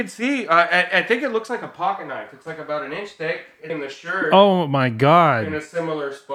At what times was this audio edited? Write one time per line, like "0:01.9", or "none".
0:03.6